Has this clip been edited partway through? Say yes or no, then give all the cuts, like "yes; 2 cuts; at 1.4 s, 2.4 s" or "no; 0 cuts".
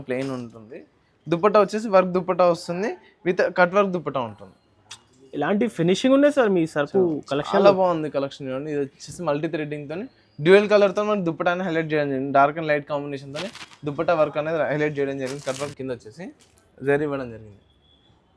yes; 1 cut; at 15.7 s